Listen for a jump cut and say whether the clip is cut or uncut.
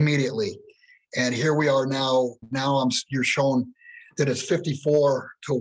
cut